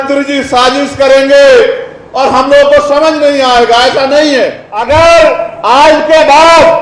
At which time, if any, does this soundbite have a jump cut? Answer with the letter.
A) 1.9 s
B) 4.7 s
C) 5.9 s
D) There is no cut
B